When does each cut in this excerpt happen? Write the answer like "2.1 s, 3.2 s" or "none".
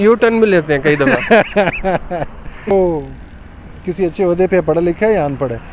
2.7 s